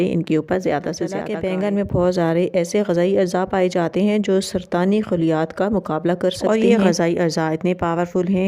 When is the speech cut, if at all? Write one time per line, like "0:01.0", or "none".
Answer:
0:01.2